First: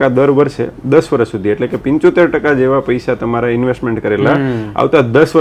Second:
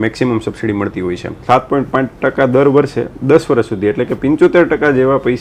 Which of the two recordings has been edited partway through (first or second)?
second